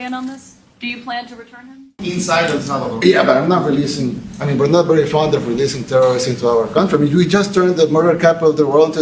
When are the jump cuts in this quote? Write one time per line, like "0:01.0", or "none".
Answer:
0:02.0